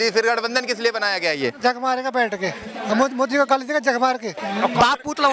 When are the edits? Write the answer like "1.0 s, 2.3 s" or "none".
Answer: 4.4 s